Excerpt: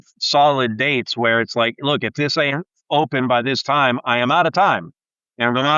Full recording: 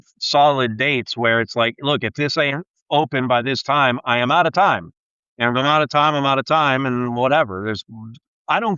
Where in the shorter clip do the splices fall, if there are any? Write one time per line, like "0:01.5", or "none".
none